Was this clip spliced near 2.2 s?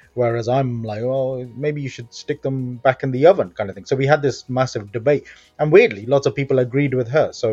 no; 0 cuts

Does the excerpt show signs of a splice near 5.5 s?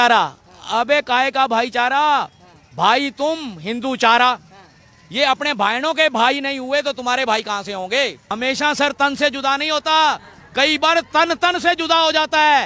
no; 1 cut; at 8.2 s

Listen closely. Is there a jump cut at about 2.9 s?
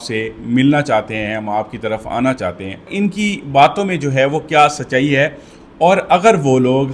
yes; 1 cut; at 2.9 s

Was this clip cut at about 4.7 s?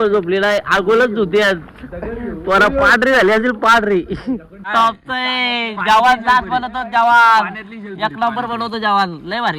yes; 1 cut; at 4.7 s

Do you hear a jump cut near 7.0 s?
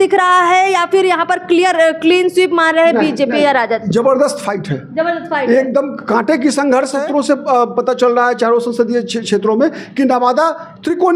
yes; 1 cut; at 7.0 s

